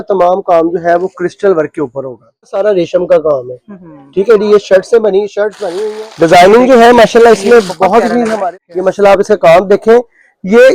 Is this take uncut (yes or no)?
no